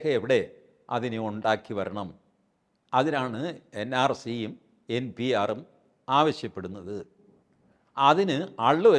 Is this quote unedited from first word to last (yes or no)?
yes